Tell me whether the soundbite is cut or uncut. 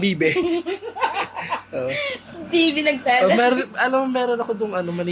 uncut